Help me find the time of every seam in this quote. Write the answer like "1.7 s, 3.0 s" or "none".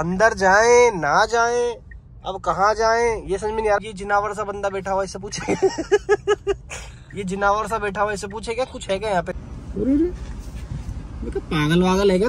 3.8 s, 9.3 s